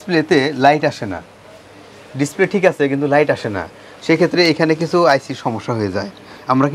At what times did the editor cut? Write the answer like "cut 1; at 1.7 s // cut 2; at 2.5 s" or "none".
none